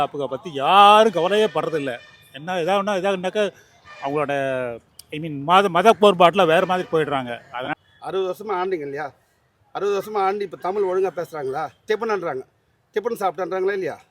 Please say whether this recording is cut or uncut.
cut